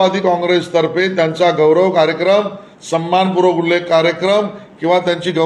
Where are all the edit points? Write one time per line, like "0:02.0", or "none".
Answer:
none

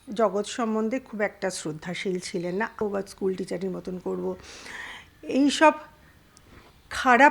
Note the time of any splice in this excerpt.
0:02.8

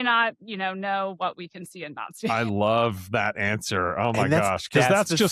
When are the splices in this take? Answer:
none

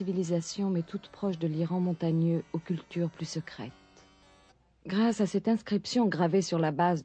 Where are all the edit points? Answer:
none

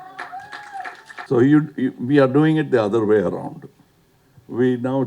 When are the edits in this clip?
0:01.3

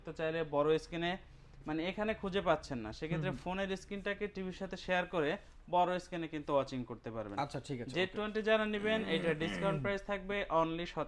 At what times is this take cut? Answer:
none

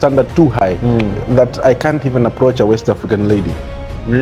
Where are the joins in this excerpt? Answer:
none

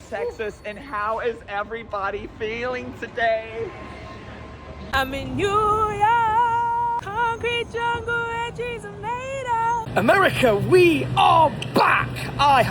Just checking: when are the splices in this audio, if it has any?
0:04.8
0:09.9

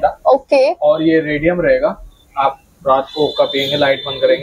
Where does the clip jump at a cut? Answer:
none

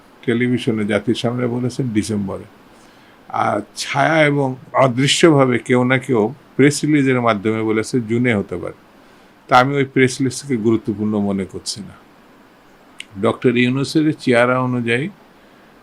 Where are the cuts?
0:04.6

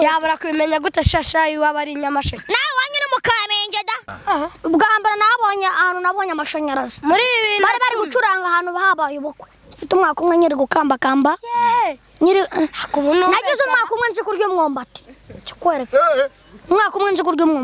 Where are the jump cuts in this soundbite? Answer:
0:04.1

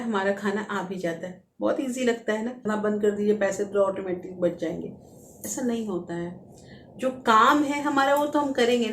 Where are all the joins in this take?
0:02.7

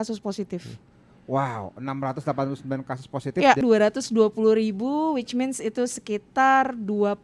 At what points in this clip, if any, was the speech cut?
0:03.6

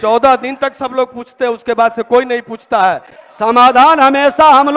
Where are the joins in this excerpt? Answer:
0:03.1

